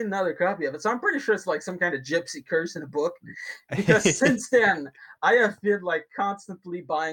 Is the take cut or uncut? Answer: uncut